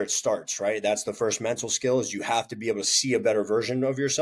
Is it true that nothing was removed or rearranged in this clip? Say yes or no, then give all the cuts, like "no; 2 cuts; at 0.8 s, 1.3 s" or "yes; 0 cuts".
yes; 0 cuts